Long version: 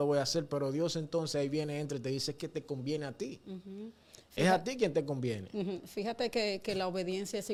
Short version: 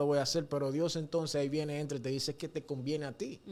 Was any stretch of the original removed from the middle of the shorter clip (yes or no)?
no